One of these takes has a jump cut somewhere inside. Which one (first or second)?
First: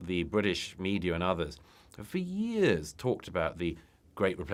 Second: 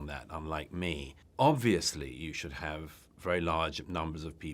second